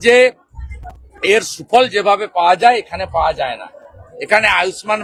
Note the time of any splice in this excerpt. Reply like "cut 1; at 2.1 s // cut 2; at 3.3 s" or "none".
none